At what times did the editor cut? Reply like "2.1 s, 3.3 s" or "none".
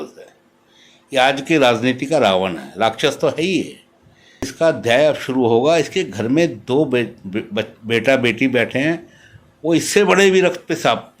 4.5 s